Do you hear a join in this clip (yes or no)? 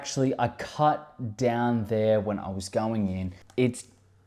yes